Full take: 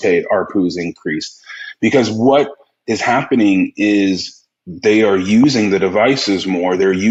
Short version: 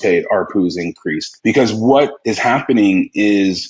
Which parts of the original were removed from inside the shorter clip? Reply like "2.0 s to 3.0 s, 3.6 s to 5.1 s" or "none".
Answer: 1.3 s to 1.6 s, 2.6 s to 2.9 s